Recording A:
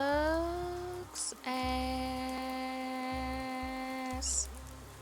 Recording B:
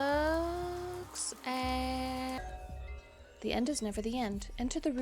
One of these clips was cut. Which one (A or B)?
B